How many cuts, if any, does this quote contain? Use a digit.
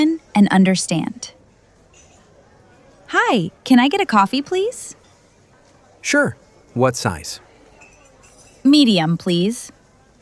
4